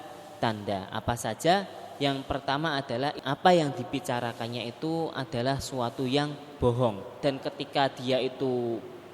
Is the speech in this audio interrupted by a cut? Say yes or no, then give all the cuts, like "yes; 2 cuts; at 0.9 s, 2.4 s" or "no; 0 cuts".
yes; 2 cuts; at 3.2 s, 7.1 s